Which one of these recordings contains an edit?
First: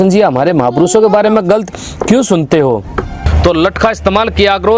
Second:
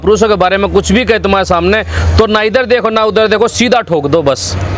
first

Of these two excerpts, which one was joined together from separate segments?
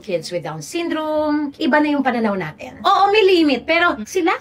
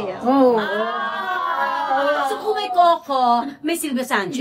first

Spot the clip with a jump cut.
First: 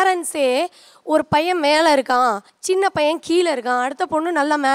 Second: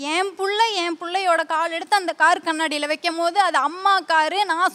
first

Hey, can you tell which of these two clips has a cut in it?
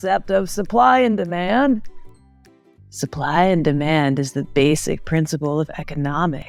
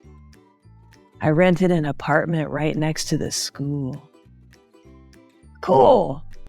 second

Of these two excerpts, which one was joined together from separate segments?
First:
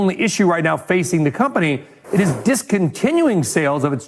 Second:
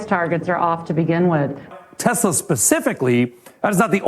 second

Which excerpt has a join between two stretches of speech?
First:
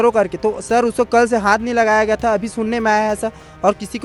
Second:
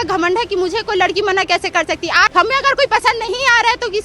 second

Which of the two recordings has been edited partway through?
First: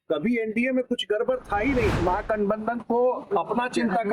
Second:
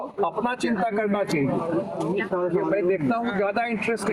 first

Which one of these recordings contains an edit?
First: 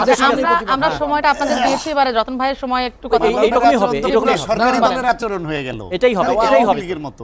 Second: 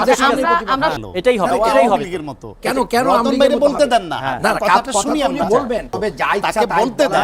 second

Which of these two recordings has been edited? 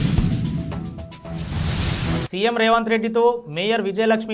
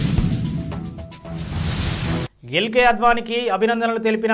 second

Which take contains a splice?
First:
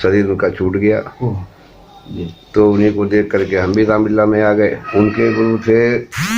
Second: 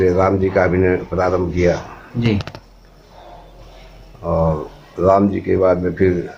first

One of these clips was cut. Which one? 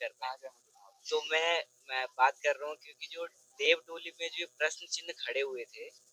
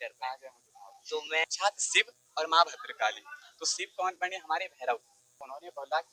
second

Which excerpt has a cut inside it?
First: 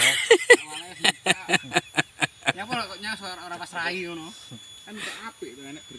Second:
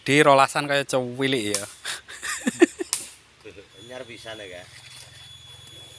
second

